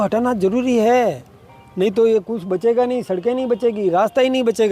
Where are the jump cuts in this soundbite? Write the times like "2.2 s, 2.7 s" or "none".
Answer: none